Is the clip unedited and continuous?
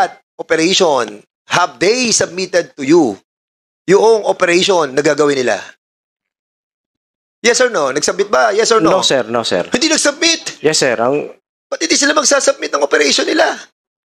yes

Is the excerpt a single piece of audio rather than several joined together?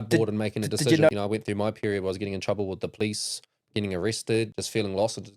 no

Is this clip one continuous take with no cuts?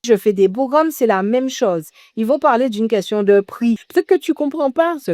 no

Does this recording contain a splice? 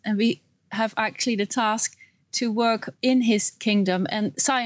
no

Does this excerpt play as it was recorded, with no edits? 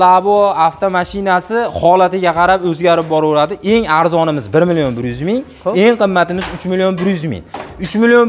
yes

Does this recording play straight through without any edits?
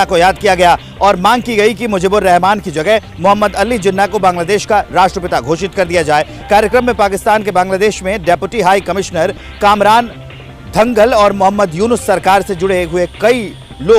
yes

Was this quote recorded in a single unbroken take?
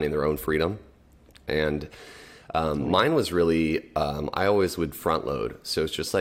yes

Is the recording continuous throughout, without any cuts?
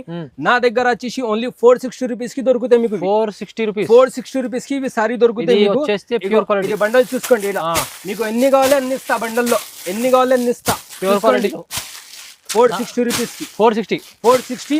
yes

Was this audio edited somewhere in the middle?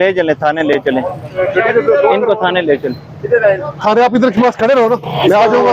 no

